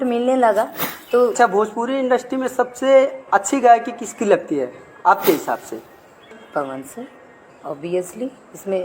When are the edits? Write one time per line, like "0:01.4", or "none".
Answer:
0:01.4
0:06.4